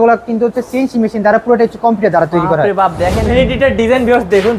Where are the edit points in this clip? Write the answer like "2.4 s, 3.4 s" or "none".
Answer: 3.3 s